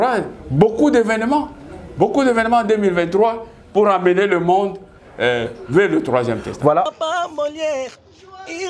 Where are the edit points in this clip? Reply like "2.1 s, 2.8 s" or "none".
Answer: 6.9 s

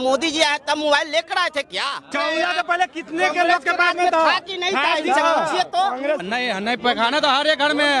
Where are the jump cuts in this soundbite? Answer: 2.1 s, 6.2 s

